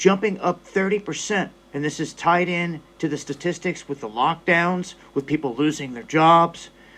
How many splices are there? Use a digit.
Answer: 0